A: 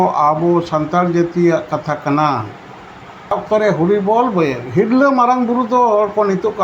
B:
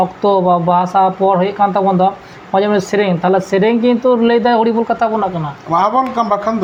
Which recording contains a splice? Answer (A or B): A